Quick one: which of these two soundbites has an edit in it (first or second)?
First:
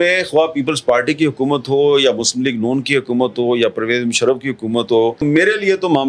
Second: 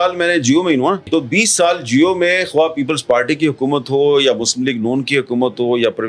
second